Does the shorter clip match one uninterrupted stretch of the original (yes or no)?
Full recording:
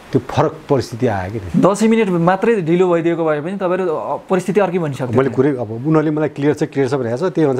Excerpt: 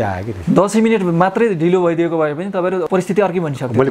no